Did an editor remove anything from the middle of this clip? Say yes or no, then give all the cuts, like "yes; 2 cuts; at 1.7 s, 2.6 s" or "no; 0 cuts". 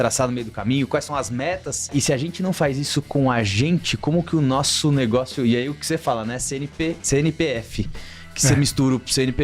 yes; 2 cuts; at 1.9 s, 7.0 s